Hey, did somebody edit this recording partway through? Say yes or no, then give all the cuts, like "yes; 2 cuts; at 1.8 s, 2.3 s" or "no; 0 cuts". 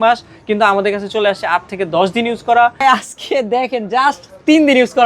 yes; 1 cut; at 2.8 s